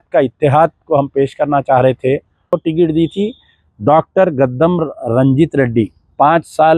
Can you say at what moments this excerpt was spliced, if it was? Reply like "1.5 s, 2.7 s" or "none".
2.6 s